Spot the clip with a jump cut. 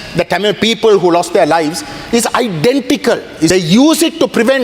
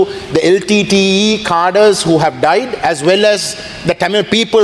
first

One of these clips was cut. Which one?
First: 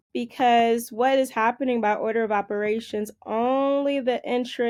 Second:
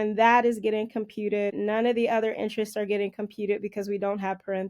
second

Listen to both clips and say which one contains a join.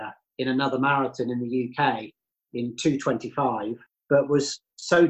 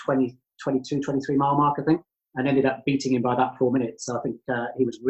first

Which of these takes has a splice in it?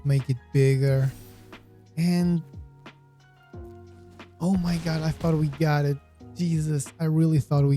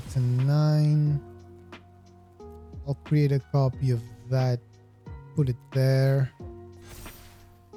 first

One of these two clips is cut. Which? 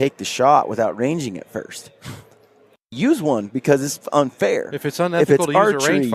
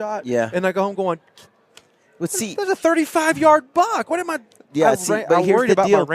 first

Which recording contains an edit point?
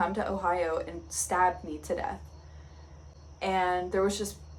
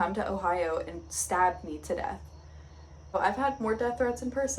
second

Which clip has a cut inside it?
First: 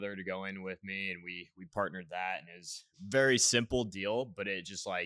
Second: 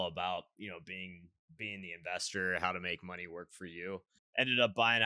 second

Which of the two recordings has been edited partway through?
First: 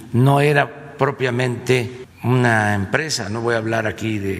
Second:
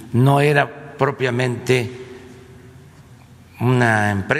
first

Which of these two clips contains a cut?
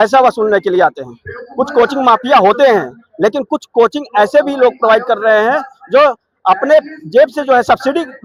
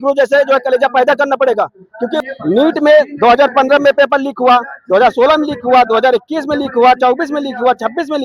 second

